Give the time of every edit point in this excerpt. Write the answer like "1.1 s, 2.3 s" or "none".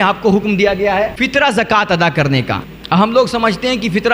1.2 s, 2.7 s

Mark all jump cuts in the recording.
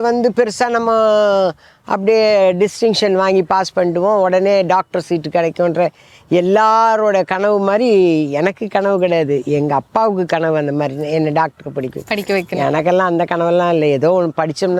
none

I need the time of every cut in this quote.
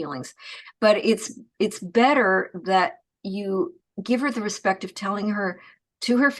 3.9 s

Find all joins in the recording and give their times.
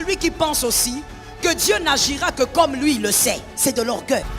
3.5 s

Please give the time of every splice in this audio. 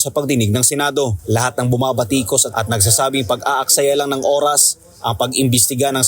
1.2 s

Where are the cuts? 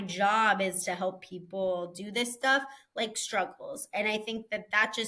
none

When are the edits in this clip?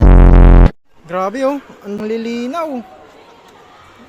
0.9 s

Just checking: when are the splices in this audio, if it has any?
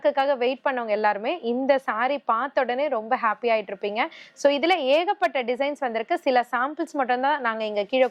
none

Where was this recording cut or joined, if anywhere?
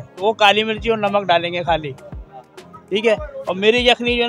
none

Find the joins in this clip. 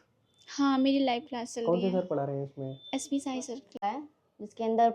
3.8 s

